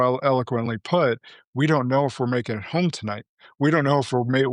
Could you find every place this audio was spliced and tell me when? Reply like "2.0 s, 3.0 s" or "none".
none